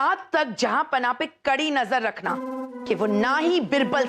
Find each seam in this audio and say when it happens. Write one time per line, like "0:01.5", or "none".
0:02.7